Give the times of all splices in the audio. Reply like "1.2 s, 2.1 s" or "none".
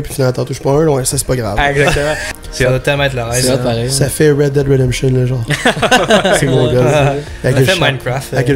2.3 s